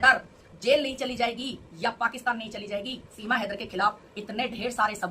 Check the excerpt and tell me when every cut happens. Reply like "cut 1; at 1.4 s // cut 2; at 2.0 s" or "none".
cut 1; at 3.1 s